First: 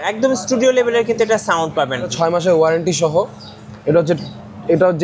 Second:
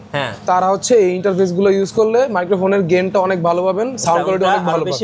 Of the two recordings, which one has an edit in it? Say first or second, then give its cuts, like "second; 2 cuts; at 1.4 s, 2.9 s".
first; 1 cut; at 2.1 s